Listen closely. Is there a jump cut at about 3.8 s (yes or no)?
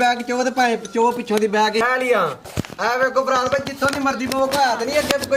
no